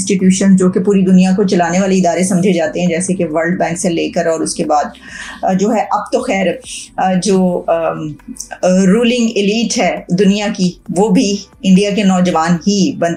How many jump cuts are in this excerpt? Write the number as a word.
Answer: zero